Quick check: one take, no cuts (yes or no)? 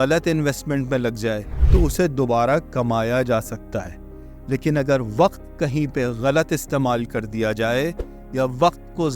no